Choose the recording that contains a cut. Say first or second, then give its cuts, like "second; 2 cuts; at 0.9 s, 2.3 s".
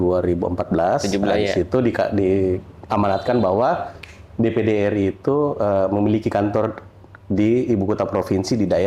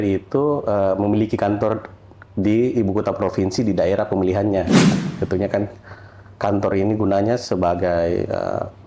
second; 1 cut; at 5.0 s